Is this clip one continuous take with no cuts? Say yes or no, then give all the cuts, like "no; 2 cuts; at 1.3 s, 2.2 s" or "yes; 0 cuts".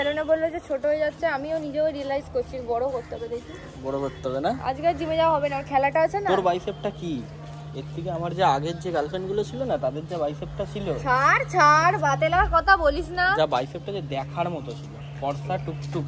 yes; 0 cuts